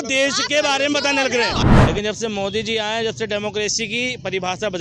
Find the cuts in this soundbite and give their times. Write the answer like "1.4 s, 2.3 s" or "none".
1.6 s